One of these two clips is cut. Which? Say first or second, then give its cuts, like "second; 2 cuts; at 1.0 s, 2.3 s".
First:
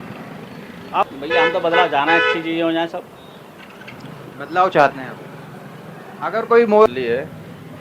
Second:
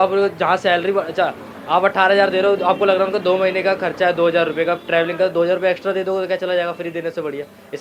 first; 2 cuts; at 1.1 s, 6.9 s